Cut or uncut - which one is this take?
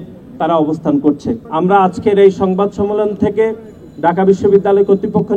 cut